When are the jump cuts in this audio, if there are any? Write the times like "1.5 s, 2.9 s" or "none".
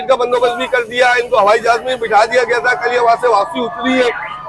none